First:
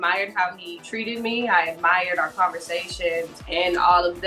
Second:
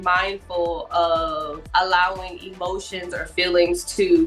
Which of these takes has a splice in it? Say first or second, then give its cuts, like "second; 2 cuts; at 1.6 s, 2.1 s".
first; 1 cut; at 3.4 s